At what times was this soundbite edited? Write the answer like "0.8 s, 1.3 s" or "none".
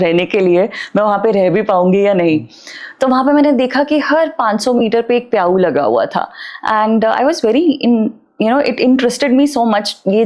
none